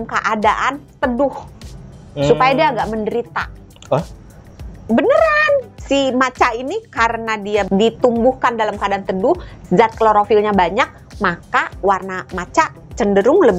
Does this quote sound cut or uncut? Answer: cut